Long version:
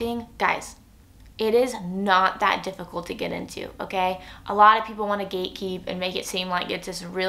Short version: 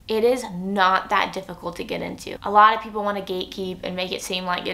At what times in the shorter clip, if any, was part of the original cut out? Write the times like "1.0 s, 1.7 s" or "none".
2.3 s